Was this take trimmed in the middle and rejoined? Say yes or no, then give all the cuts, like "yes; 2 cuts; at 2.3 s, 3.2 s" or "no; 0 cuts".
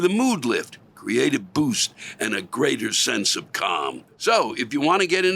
yes; 1 cut; at 4.1 s